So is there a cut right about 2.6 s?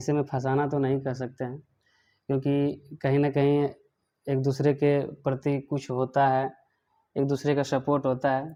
no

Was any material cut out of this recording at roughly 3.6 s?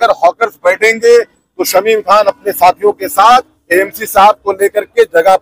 yes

